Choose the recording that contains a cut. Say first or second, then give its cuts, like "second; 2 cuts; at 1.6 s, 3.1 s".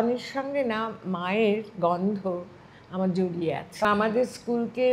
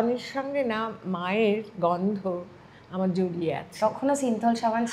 first; 1 cut; at 3.8 s